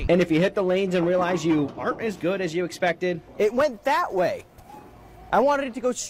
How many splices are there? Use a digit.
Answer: 0